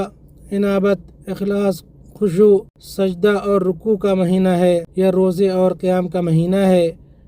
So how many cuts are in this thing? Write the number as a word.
two